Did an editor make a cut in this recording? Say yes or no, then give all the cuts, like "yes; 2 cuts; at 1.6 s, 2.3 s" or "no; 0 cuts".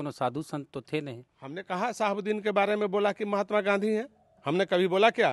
no; 0 cuts